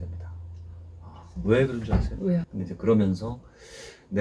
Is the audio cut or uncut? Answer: cut